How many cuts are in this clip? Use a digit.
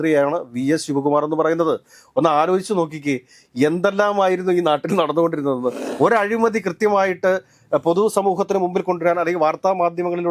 1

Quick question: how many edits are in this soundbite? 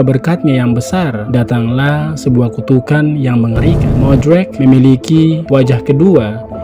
1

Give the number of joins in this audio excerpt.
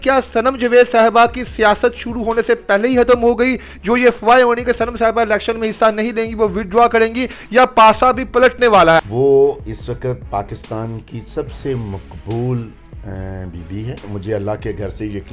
2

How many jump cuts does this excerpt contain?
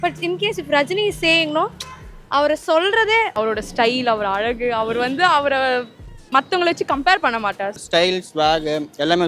2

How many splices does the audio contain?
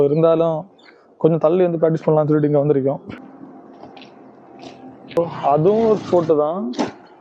2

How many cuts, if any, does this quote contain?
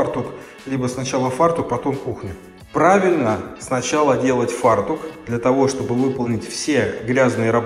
0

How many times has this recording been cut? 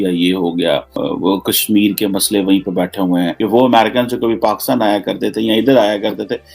2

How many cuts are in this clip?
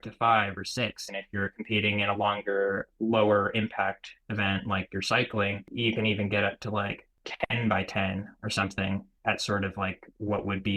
4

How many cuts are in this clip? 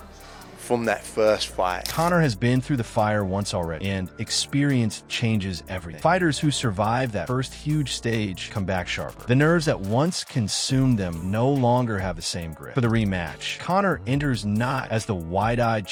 0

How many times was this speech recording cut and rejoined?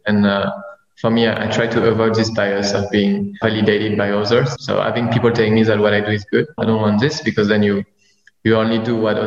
3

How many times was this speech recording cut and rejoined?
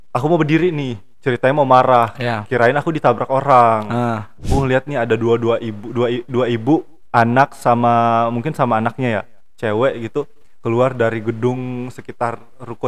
1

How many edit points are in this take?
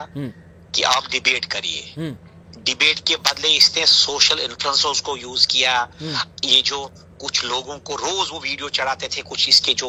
0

